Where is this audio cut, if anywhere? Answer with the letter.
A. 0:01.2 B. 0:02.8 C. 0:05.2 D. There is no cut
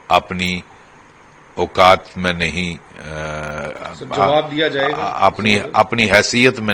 D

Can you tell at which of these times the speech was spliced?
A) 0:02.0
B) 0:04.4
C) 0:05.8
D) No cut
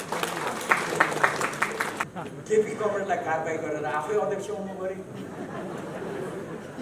A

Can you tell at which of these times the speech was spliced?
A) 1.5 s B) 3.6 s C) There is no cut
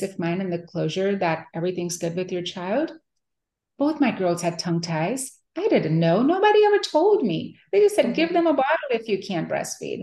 B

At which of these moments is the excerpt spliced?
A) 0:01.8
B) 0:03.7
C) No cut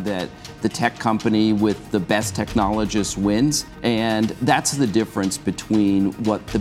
B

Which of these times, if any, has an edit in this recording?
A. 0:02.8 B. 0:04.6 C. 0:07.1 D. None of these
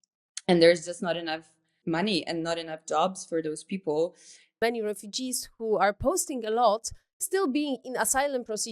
B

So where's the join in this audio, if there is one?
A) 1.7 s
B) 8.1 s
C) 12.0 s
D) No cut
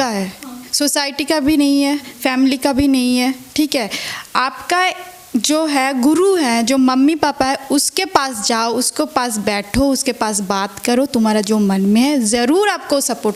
D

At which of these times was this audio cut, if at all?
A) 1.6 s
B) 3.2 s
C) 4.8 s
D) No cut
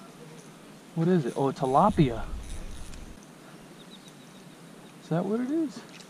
B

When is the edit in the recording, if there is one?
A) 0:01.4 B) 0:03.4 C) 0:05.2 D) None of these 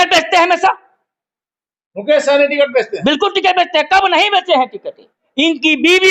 C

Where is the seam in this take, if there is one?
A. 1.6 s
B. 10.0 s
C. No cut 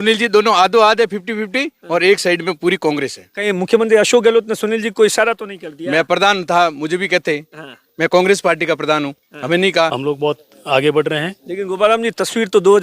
B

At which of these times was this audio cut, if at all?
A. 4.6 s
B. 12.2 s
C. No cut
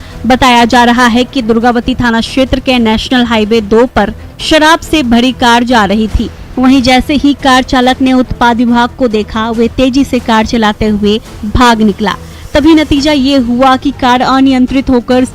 C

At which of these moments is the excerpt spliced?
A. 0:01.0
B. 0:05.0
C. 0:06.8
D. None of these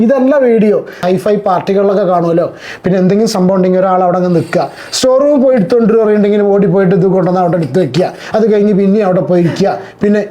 A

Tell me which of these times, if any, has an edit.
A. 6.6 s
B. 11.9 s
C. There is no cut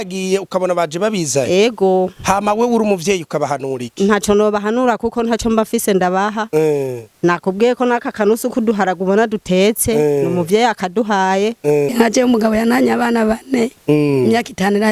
B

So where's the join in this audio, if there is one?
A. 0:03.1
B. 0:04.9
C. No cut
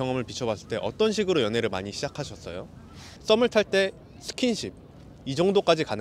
A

